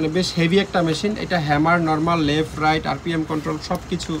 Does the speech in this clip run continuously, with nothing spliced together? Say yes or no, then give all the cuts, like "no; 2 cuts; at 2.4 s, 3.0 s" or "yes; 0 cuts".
yes; 0 cuts